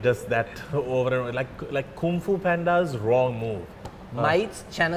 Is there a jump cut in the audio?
no; 0 cuts

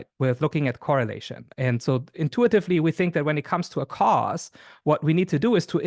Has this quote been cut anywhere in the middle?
no; 0 cuts

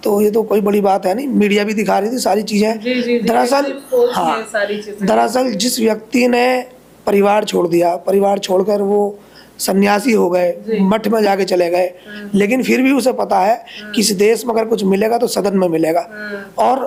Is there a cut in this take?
no; 0 cuts

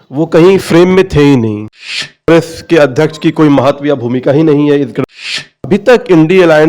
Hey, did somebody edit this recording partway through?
yes; 2 cuts; at 2.2 s, 5.0 s

